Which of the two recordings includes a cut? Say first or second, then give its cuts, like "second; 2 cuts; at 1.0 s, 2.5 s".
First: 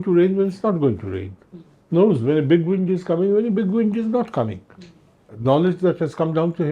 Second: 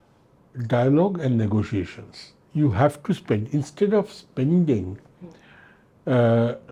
first; 1 cut; at 5.2 s